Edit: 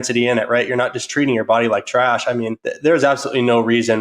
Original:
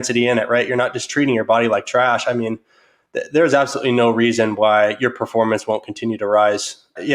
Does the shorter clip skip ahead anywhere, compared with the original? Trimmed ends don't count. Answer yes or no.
yes